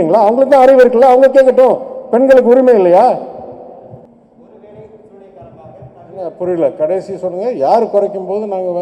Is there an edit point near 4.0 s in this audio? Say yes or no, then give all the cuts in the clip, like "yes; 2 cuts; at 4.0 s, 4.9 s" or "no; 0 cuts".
yes; 1 cut; at 4.0 s